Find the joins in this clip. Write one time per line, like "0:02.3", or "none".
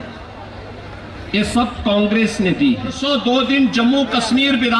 0:03.0